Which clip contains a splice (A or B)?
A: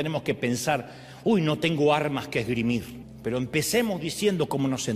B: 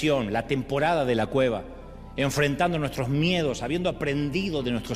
A